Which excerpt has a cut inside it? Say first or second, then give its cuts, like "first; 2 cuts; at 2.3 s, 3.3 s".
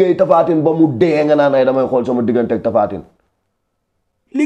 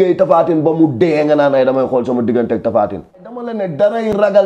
second; 1 cut; at 3.5 s